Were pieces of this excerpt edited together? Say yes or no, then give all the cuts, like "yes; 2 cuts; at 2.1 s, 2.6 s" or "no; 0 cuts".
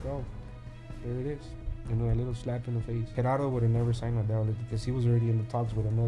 yes; 1 cut; at 3.0 s